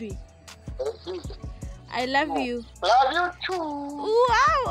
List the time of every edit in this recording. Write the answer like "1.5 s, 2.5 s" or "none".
2.7 s